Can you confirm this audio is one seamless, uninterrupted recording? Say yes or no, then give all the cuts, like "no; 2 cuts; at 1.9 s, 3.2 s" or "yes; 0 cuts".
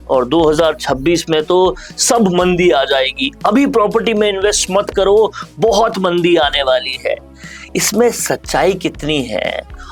yes; 0 cuts